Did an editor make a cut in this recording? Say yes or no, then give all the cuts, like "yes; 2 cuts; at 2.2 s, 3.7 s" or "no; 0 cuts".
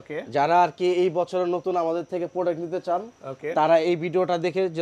no; 0 cuts